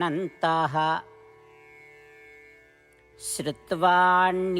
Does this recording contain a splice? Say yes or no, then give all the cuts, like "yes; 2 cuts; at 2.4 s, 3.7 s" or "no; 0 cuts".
yes; 2 cuts; at 1.2 s, 3.1 s